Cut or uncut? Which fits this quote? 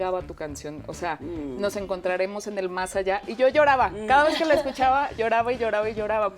uncut